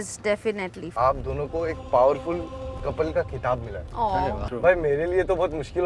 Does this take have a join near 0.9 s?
yes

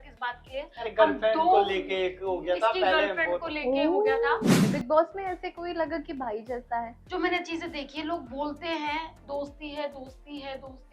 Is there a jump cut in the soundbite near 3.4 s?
no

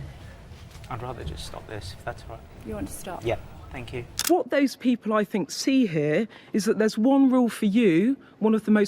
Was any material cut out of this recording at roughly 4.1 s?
yes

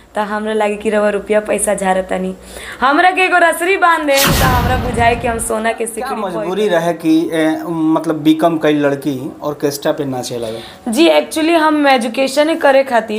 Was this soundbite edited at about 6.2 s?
yes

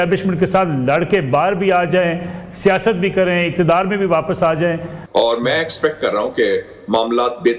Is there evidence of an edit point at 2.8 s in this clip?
no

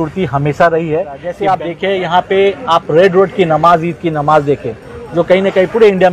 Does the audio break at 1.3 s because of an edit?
yes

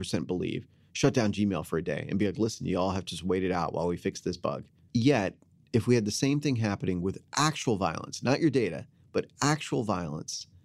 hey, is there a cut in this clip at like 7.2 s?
no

